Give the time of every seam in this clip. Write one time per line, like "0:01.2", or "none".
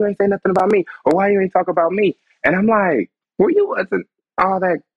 0:03.2